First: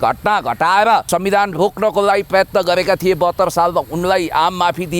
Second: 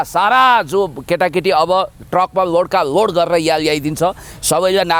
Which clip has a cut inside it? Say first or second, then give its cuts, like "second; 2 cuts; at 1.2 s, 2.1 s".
first; 1 cut; at 1.1 s